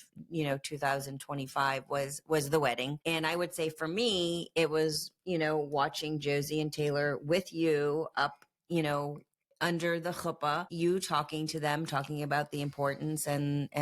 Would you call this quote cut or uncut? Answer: cut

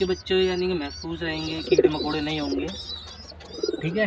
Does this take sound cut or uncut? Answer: uncut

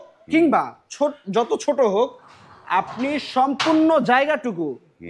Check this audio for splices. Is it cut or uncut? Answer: uncut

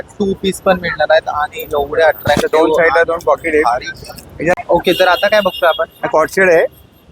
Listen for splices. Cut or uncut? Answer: cut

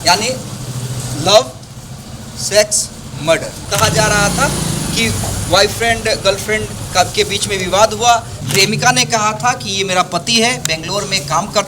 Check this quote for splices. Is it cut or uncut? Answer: cut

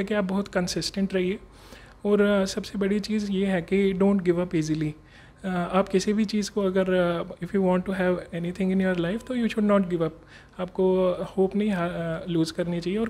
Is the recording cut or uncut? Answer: uncut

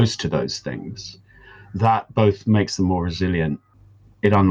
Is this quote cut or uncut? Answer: uncut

